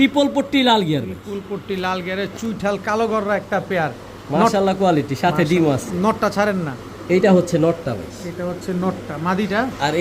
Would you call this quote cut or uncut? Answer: uncut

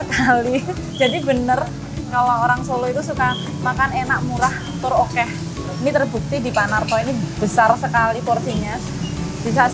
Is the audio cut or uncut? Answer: uncut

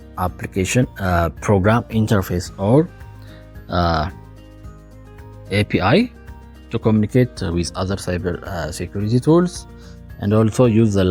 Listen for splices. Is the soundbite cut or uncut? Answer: uncut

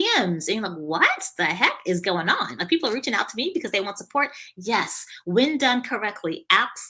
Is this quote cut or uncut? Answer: uncut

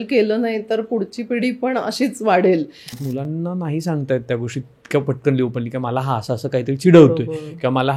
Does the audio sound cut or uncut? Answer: cut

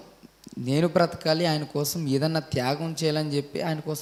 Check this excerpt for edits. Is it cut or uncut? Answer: uncut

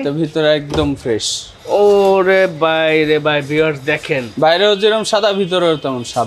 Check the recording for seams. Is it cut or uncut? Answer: uncut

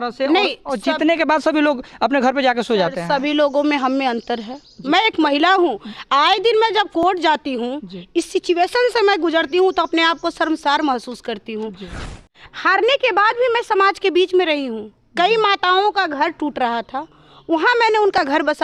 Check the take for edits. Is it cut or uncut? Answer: cut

